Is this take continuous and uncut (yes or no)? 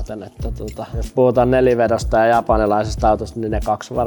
yes